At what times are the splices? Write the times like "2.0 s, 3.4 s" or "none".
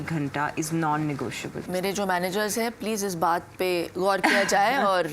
1.6 s